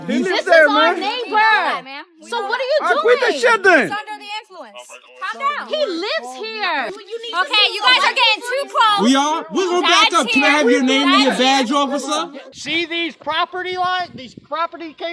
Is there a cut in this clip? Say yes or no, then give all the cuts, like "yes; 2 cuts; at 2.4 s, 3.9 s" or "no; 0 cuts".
yes; 1 cut; at 12.5 s